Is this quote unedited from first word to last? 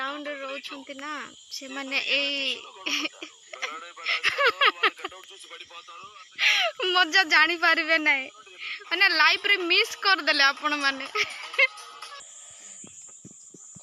no; 1 cut; at 12.3 s

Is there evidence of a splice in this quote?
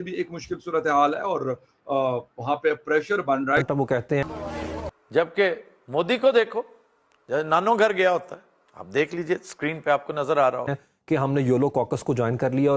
yes; 2 cuts; at 4.2 s, 10.8 s

